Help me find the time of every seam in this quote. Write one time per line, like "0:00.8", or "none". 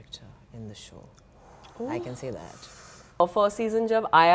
0:03.2